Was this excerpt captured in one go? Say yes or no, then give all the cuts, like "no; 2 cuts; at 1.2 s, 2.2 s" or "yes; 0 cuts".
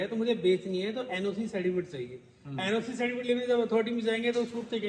yes; 0 cuts